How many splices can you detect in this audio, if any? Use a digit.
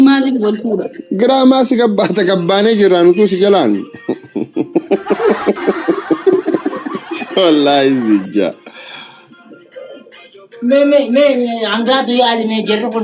0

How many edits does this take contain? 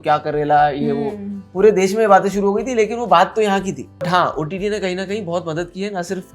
1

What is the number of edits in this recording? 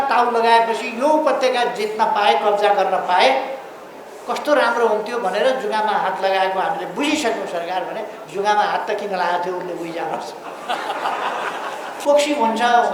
1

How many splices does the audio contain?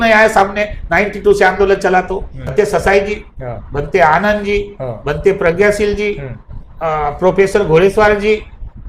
1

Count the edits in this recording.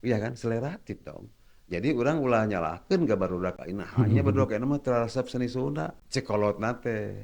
1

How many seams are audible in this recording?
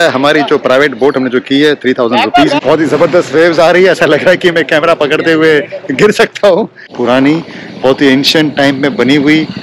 2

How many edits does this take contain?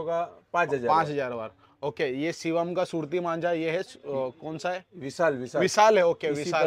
0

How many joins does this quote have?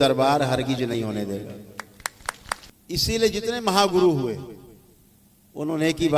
1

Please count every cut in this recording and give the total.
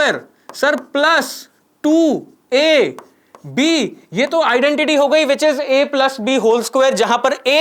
0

